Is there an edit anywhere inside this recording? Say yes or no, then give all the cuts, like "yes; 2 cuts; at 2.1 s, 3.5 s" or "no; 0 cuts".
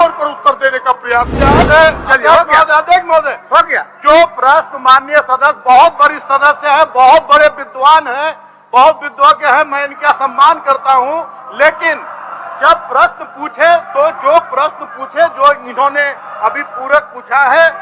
yes; 1 cut; at 1.6 s